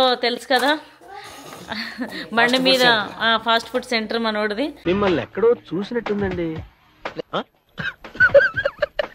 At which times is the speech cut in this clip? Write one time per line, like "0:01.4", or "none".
none